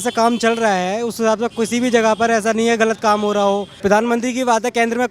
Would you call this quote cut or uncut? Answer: cut